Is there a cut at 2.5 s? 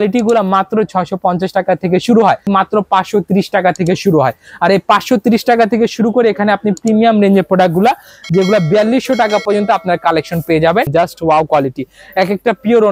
yes; 2 cuts; at 2.5 s, 10.9 s

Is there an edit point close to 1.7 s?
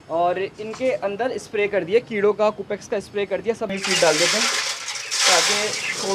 no; 1 cut; at 3.7 s

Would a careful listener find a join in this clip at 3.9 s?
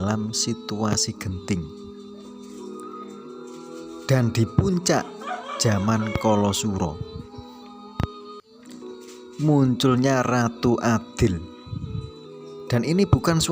yes; 2 cuts; at 1.6 s, 3.9 s

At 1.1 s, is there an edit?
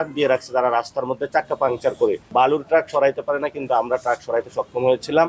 no; 1 cut; at 2.3 s

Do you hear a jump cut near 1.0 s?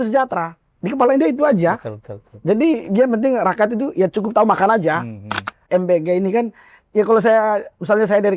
no; 1 cut; at 5.6 s

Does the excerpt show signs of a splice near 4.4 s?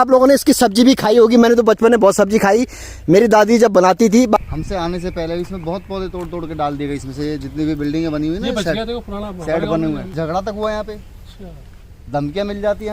yes; 2 cuts; at 4.4 s, 10.1 s

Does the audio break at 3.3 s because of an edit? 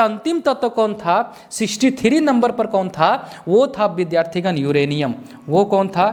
no; 0 cuts

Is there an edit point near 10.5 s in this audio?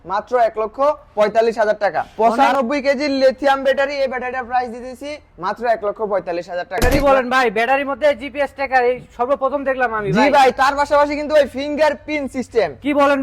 no; 2 cuts; at 2.1 s, 6.8 s

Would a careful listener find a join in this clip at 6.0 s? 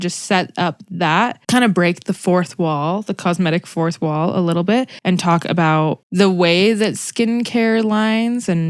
yes; 2 cuts; at 1.4 s, 6.0 s

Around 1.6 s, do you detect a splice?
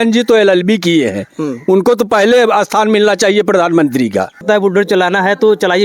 no; 1 cut; at 4.4 s

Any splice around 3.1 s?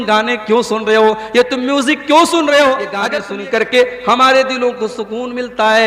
yes; 1 cut; at 3.1 s

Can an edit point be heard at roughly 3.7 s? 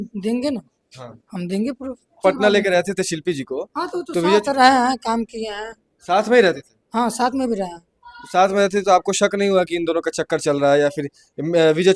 no; 1 cut; at 2.2 s

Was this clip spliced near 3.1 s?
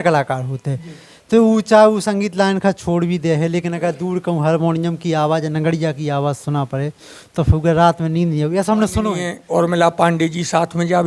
no; 1 cut; at 9.3 s

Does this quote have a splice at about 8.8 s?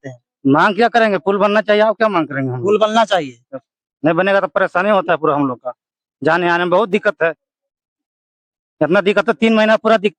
no; 0 cuts

